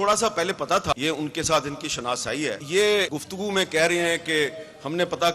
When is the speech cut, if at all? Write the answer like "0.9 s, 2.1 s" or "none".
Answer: 0.9 s, 2.6 s, 3.2 s